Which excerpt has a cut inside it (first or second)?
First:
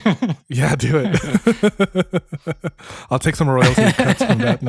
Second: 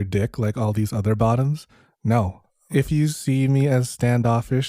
second